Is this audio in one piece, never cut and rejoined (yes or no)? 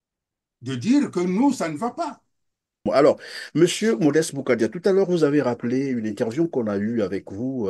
no